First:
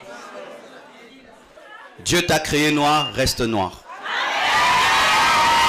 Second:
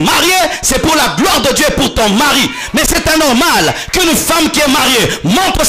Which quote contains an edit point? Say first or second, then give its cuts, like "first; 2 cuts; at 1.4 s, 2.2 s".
first; 1 cut; at 1.6 s